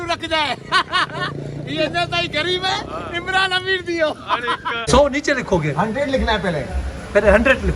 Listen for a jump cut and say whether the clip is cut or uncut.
cut